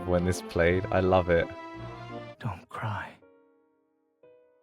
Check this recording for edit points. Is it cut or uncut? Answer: cut